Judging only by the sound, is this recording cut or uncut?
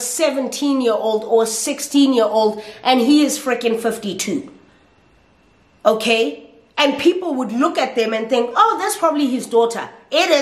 uncut